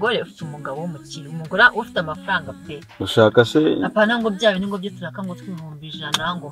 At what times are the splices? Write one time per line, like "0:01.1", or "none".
none